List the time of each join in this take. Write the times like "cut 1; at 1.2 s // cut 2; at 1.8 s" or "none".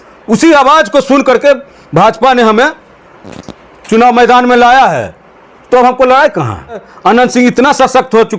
cut 1; at 6.9 s